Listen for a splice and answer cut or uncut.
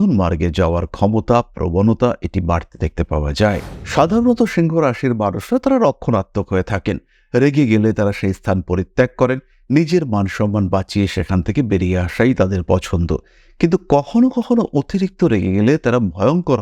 cut